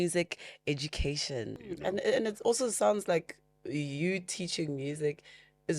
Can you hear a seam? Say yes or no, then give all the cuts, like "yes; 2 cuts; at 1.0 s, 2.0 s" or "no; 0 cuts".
yes; 1 cut; at 1.6 s